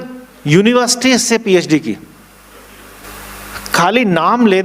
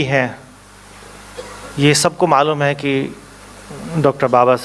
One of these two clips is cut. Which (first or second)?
first